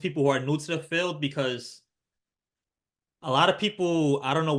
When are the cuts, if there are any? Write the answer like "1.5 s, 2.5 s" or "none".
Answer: none